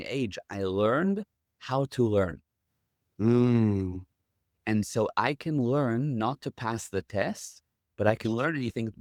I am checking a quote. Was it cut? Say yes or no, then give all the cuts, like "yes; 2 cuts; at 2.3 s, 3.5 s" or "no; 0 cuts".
no; 0 cuts